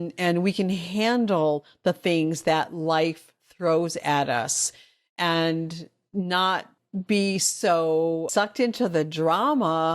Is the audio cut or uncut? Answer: cut